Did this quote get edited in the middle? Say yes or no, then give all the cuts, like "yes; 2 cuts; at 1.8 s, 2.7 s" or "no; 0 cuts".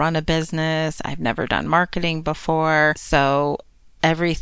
yes; 1 cut; at 3.0 s